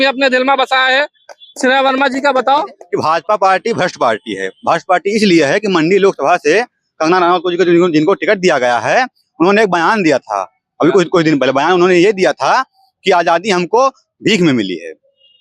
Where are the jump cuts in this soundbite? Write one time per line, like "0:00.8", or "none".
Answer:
0:02.8